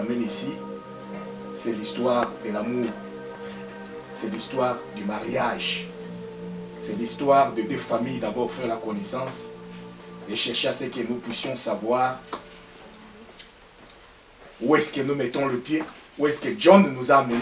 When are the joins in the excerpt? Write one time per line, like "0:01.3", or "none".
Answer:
none